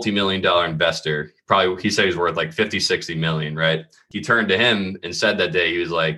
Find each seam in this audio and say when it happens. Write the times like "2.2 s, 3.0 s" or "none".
4.0 s